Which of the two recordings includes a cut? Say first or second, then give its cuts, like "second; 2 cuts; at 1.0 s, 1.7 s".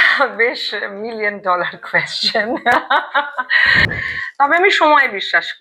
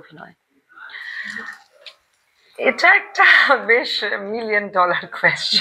first; 1 cut; at 4.1 s